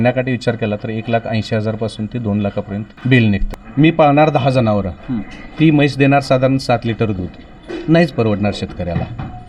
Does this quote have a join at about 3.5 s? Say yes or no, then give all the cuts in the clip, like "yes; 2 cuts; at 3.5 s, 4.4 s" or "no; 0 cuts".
yes; 2 cuts; at 2.9 s, 3.5 s